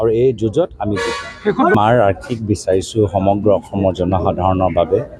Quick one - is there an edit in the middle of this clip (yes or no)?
no